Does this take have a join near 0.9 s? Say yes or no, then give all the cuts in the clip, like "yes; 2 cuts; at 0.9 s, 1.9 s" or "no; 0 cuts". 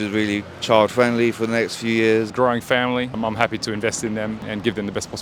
no; 3 cuts; at 2.3 s, 3.2 s, 4.4 s